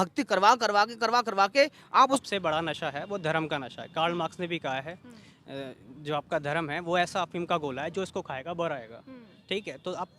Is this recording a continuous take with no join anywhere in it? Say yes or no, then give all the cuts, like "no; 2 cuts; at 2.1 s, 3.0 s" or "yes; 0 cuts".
no; 1 cut; at 2.2 s